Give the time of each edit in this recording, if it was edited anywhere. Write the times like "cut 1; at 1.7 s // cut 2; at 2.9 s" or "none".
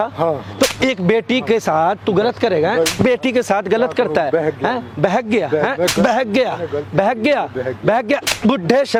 none